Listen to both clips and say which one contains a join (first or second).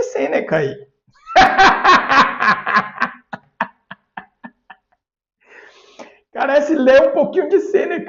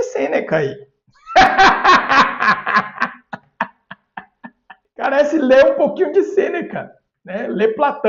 second